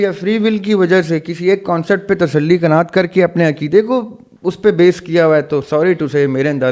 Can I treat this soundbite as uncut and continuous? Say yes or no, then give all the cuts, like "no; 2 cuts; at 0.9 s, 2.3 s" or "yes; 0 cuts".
yes; 0 cuts